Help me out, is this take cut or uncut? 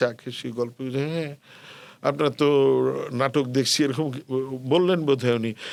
uncut